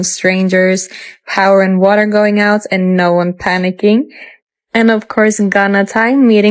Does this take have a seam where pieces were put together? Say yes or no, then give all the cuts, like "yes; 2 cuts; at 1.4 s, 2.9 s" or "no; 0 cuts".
no; 0 cuts